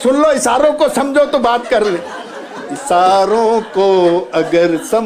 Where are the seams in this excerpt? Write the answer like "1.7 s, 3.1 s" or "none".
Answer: none

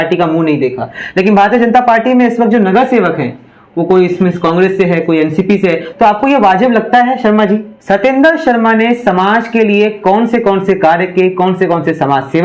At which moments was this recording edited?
7.7 s

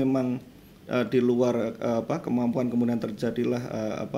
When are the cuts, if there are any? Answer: none

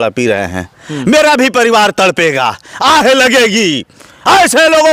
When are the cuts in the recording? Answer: none

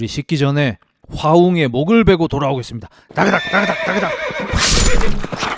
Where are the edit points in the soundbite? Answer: none

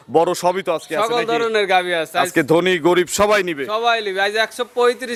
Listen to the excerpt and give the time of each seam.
none

